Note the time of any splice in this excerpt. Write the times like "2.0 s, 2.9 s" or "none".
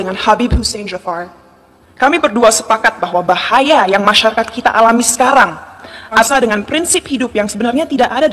6.3 s